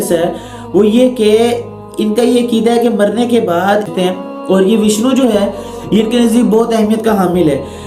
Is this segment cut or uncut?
cut